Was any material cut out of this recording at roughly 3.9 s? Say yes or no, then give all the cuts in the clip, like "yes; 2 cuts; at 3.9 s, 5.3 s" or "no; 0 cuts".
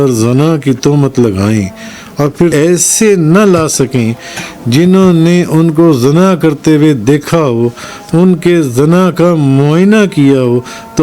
no; 1 cut; at 2.5 s